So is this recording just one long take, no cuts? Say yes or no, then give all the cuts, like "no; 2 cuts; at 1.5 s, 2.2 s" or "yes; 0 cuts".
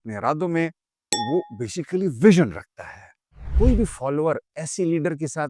no; 2 cuts; at 1.2 s, 3.5 s